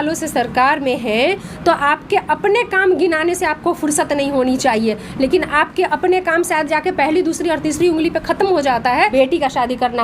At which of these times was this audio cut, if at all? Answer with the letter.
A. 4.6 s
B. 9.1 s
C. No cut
B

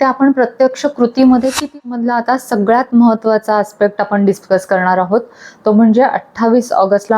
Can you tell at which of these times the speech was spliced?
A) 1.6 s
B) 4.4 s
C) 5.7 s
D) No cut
A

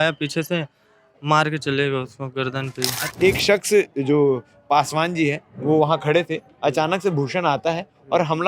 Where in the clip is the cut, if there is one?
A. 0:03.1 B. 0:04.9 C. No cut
A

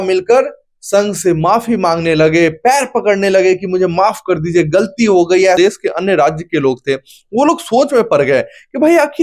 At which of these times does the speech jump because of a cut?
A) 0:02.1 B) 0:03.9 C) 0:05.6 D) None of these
C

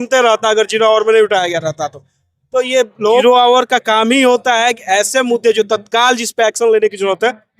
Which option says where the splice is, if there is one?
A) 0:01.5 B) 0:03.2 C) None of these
B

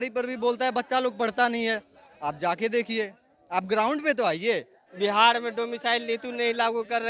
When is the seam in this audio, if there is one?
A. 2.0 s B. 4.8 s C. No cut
B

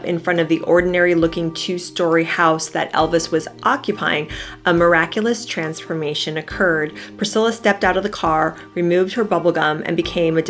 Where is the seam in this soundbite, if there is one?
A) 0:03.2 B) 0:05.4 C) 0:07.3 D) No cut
D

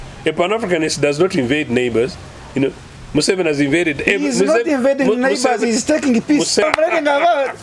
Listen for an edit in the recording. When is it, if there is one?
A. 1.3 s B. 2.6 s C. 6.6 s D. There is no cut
C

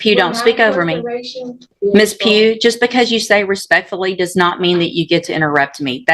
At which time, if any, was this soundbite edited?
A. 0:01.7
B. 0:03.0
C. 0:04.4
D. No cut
A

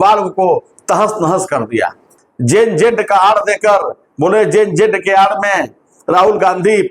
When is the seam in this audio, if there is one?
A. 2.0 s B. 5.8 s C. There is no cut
A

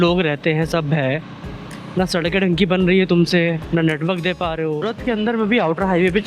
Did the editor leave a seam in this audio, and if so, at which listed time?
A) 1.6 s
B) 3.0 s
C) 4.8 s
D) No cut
C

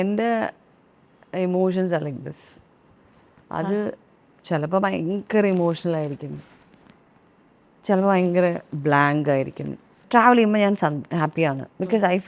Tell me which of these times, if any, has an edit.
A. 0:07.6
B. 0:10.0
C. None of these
B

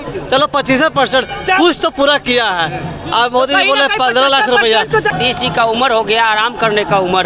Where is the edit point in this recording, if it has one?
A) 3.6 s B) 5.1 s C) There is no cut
B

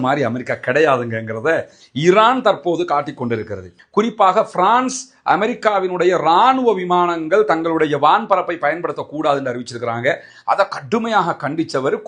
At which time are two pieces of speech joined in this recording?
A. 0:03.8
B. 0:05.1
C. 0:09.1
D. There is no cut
A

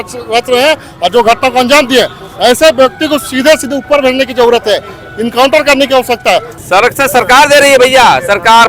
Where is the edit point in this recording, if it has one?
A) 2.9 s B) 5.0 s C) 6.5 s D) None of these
C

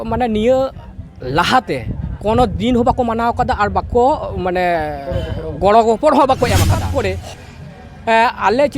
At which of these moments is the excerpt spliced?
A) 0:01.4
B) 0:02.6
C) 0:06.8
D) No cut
C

